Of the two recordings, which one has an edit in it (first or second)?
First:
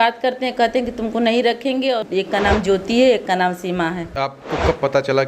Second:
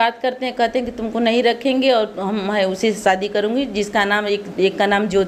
first